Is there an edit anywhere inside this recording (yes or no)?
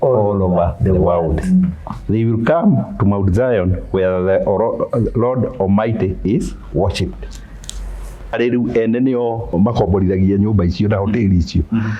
yes